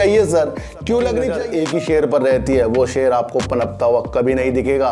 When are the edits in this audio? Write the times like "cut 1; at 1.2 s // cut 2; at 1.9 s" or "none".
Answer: cut 1; at 1.4 s